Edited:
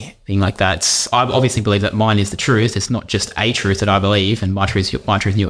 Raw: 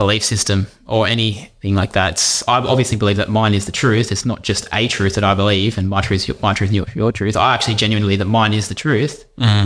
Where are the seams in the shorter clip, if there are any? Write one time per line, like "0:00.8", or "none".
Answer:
none